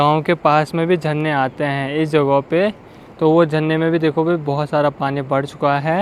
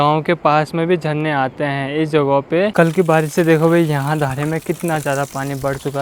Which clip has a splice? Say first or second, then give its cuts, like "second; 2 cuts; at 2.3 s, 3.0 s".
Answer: second; 1 cut; at 2.7 s